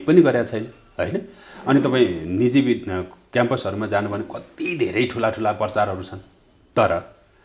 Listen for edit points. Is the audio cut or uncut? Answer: uncut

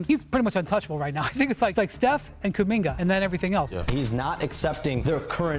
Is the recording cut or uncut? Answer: cut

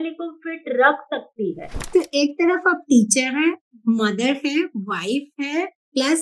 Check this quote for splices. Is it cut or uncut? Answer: cut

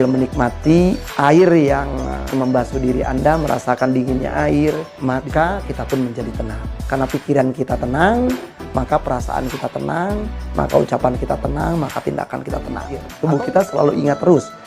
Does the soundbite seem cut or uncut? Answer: cut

